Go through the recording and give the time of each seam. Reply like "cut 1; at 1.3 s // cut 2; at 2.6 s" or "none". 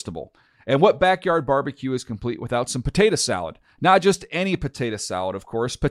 none